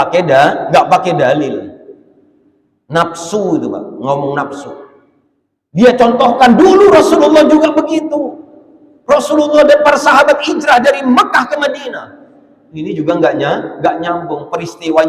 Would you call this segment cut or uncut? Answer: uncut